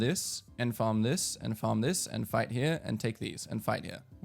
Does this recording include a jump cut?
no; 0 cuts

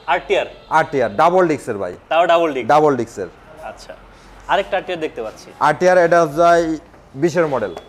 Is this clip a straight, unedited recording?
yes; 0 cuts

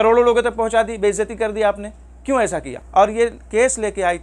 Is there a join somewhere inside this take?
yes; 1 cut; at 2.8 s

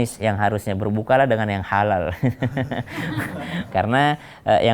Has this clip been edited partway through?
yes; 1 cut; at 3.7 s

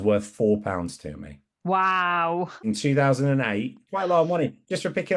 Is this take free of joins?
no; 2 cuts; at 2.6 s, 3.8 s

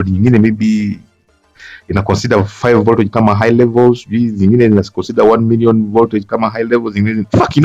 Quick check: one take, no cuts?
yes; 0 cuts

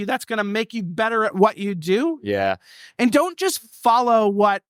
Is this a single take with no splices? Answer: yes; 0 cuts

